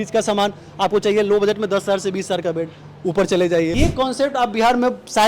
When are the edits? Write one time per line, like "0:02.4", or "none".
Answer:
0:03.7